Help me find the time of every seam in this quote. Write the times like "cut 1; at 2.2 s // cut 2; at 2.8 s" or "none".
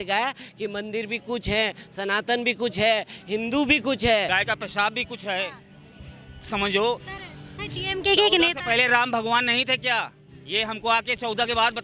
cut 1; at 4.3 s

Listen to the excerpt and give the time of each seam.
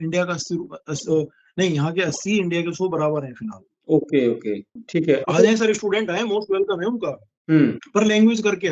none

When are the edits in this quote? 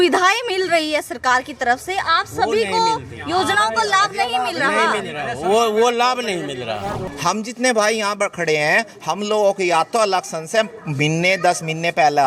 cut 1; at 7.1 s

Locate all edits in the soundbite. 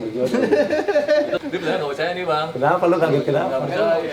cut 1; at 1.4 s

